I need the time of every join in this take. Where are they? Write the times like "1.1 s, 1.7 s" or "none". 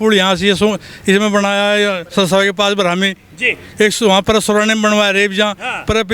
none